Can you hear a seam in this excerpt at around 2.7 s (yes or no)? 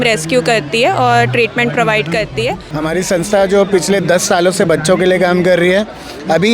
yes